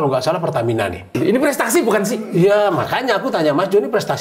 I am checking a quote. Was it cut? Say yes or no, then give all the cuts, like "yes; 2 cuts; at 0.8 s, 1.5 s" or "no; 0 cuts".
yes; 1 cut; at 1.1 s